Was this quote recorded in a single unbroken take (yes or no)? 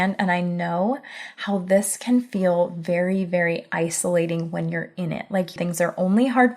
no